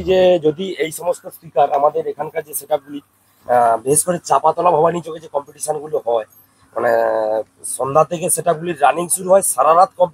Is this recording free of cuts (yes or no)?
yes